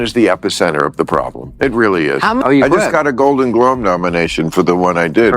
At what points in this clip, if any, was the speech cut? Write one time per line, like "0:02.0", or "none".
0:02.5